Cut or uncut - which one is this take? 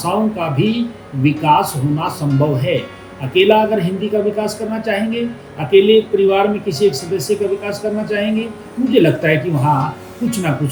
uncut